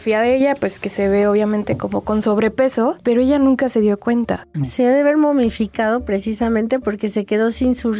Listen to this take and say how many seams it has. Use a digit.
1